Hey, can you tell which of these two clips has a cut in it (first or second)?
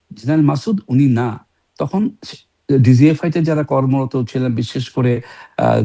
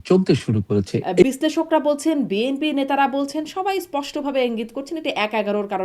second